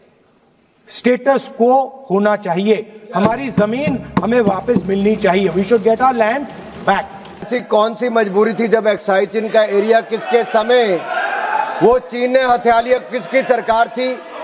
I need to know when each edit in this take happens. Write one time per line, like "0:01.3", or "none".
0:07.5